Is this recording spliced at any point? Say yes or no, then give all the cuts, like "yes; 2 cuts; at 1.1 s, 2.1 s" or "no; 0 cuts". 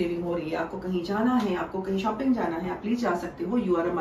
no; 0 cuts